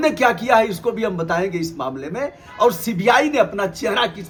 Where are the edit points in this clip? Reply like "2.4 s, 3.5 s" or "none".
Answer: none